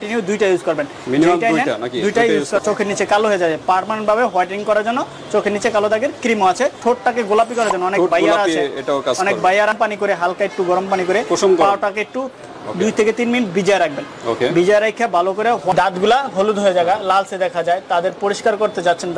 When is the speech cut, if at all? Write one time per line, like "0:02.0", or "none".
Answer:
0:02.6
0:06.8
0:09.7
0:15.7